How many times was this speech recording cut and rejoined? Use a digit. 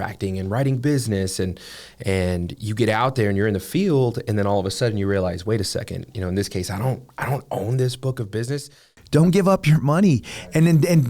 1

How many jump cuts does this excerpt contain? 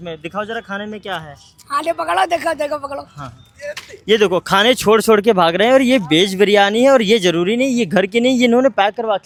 0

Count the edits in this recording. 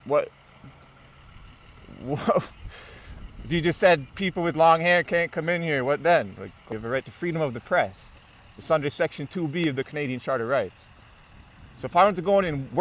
1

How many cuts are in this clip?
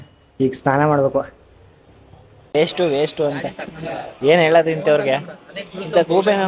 1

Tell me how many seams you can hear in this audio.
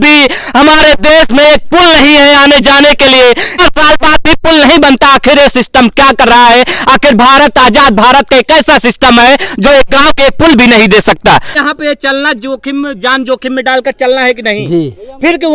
2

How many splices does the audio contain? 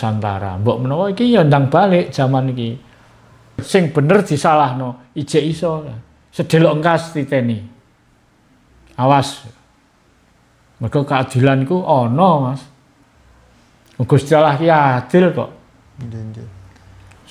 1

